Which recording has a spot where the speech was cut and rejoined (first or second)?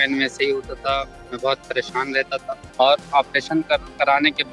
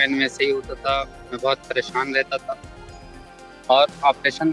first